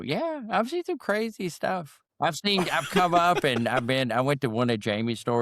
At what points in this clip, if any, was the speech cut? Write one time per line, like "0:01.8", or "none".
0:02.0